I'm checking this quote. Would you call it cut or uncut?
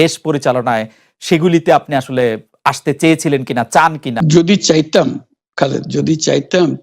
cut